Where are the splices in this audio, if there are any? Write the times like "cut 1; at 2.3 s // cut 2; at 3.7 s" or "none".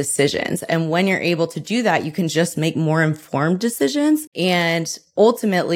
cut 1; at 4.3 s